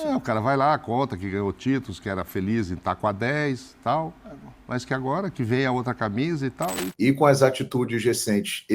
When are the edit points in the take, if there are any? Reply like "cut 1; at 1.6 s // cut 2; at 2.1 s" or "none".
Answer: cut 1; at 6.8 s